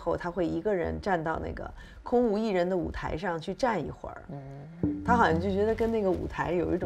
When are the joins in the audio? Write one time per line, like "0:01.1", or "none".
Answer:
none